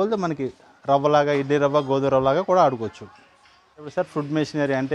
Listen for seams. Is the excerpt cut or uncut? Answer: cut